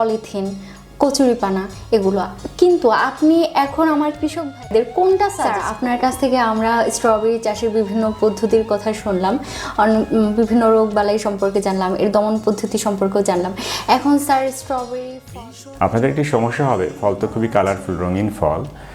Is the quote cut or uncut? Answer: cut